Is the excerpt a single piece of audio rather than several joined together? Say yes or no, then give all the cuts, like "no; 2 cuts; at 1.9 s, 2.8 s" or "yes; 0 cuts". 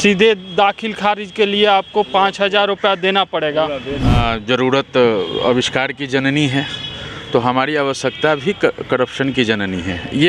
no; 1 cut; at 4.2 s